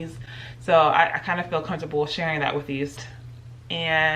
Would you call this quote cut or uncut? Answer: cut